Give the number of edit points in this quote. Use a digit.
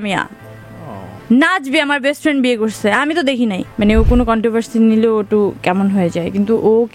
1